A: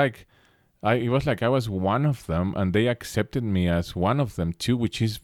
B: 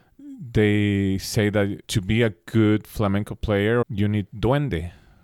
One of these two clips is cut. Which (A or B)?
B